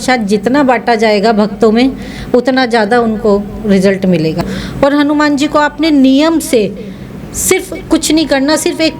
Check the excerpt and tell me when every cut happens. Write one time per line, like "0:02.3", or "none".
0:04.4